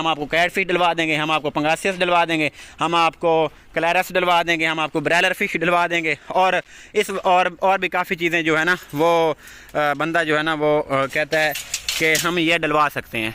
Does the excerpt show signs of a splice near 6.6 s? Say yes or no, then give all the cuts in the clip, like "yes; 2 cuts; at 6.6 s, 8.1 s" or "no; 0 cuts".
no; 0 cuts